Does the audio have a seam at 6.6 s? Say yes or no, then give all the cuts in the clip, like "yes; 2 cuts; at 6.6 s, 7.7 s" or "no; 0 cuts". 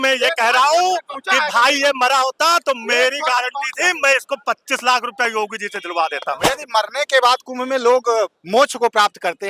yes; 1 cut; at 6.6 s